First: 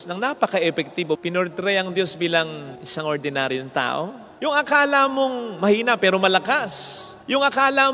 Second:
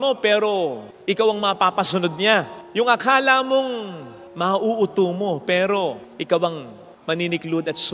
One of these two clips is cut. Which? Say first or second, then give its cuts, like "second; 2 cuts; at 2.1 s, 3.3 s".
first; 2 cuts; at 1.2 s, 4.2 s